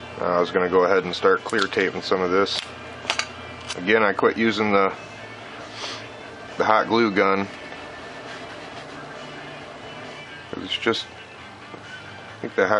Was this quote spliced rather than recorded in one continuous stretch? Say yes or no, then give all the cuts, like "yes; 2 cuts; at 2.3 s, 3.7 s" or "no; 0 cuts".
yes; 1 cut; at 5.0 s